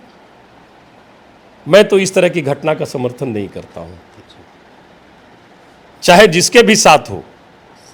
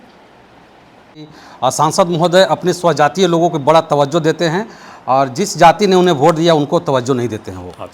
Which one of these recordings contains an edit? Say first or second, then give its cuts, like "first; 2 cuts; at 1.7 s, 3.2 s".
second; 1 cut; at 1.4 s